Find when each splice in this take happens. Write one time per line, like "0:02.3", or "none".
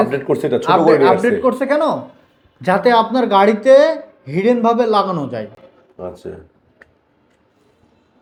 none